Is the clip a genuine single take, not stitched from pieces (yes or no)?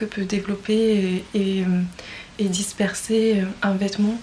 yes